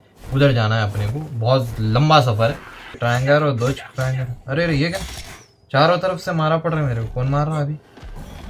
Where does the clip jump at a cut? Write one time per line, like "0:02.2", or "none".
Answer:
0:03.0